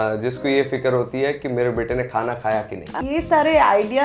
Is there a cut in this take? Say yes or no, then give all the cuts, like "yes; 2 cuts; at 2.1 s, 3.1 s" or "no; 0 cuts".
yes; 1 cut; at 3.0 s